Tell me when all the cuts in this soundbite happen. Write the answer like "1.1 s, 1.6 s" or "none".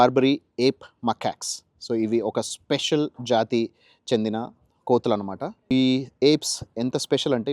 5.5 s